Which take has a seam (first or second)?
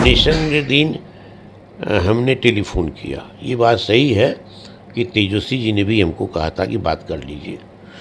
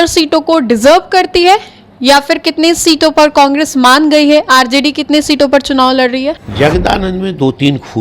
second